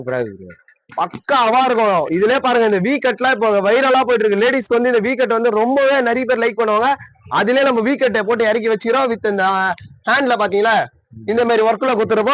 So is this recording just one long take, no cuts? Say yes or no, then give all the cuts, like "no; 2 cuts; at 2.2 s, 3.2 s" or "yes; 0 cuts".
yes; 0 cuts